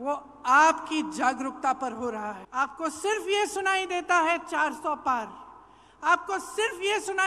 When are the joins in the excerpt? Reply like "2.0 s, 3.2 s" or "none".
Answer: 2.4 s